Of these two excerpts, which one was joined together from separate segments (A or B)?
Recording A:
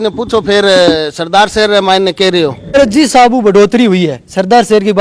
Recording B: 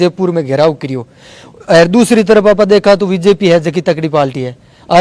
A